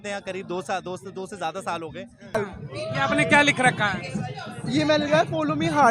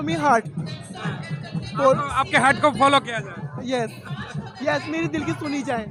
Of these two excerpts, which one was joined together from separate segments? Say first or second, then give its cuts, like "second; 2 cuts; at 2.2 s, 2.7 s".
first; 1 cut; at 2.3 s